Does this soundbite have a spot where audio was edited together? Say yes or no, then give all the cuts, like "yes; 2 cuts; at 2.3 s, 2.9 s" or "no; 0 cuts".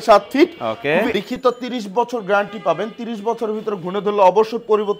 yes; 1 cut; at 1.1 s